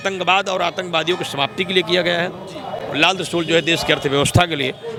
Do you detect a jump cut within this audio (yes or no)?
no